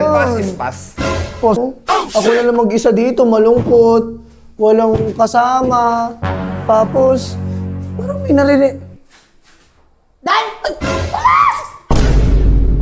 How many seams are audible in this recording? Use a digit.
1